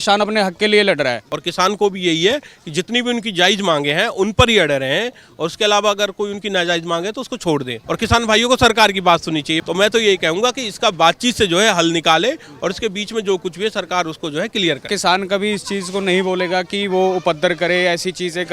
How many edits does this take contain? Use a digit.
4